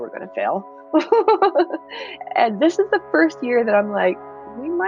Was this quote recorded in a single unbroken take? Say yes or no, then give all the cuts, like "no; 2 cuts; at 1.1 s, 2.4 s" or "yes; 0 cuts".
yes; 0 cuts